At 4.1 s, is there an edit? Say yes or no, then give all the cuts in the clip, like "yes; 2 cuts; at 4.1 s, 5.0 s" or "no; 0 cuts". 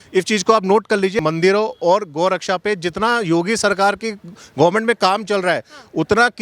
no; 1 cut; at 1.2 s